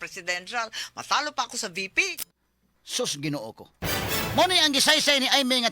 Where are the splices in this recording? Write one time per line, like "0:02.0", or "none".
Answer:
0:02.3